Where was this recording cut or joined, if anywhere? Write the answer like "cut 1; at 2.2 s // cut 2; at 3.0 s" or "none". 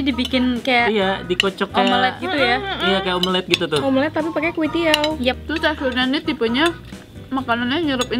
cut 1; at 5.4 s